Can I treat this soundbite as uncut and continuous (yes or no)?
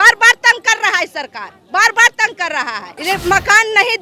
no